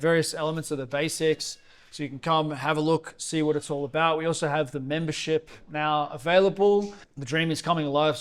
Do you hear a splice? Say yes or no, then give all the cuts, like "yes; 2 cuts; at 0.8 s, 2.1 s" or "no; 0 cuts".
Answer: yes; 1 cut; at 7.0 s